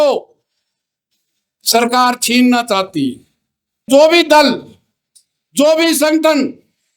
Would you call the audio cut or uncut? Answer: cut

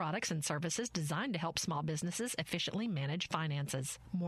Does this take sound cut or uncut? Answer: uncut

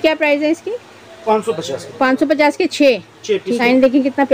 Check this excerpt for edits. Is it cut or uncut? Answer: cut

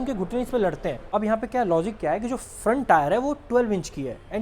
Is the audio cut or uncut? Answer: cut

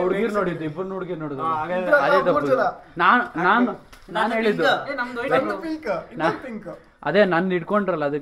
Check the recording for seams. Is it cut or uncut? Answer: uncut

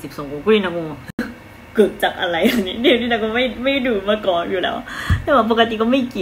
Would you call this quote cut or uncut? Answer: uncut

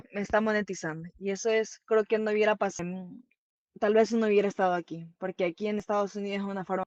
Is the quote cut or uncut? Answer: uncut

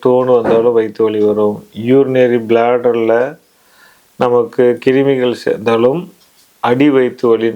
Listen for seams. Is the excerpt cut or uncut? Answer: uncut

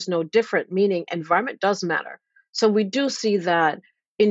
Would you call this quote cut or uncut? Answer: uncut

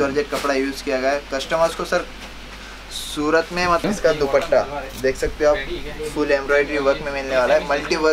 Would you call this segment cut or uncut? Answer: cut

